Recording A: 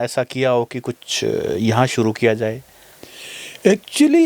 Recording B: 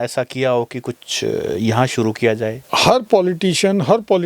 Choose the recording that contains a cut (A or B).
B